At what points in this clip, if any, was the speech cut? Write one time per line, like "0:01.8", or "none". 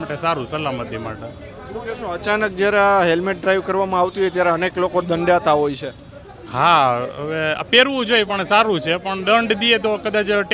none